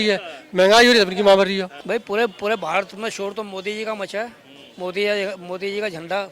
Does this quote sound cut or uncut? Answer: cut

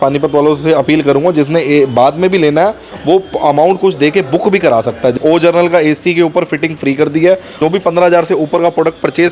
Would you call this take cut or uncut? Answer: cut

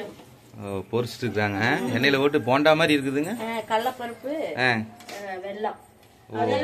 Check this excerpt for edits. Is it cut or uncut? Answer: uncut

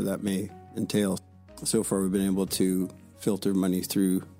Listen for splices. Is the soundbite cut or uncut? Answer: cut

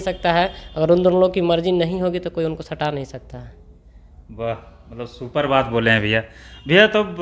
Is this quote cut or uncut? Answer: uncut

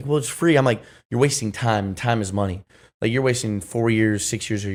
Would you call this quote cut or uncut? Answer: uncut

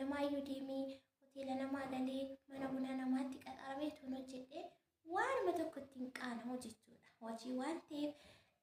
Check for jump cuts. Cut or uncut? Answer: uncut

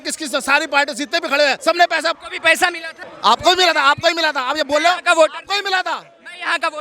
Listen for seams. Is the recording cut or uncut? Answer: cut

